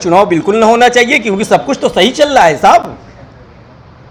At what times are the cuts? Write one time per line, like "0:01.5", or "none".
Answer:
none